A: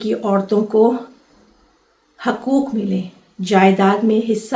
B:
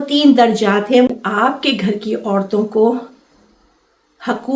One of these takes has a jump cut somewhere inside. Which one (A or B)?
B